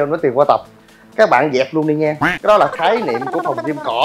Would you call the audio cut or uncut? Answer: cut